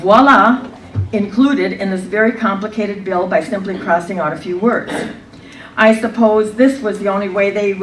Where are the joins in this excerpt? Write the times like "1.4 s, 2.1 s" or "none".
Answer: 6.5 s

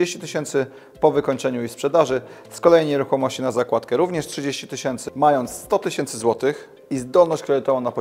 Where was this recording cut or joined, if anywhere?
5.0 s

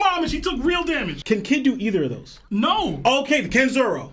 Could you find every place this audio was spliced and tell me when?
1.1 s

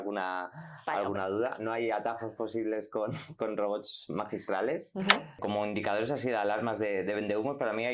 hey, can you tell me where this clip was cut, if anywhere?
5.4 s

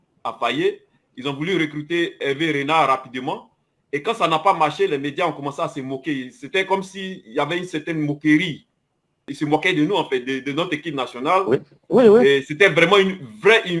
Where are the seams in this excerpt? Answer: 9.2 s

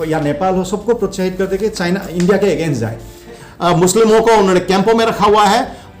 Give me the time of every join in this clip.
3.4 s

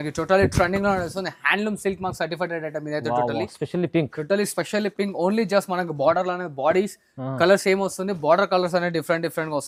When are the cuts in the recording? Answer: none

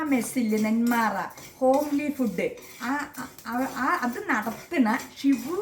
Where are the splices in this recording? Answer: none

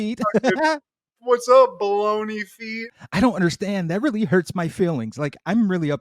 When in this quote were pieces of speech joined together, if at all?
2.9 s

